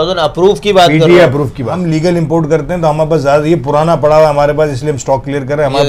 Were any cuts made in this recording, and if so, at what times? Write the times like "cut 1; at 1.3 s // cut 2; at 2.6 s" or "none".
cut 1; at 1.8 s